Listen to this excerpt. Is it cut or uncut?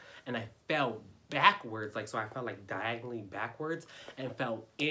uncut